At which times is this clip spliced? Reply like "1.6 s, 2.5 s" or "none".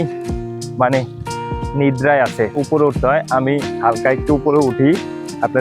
2.6 s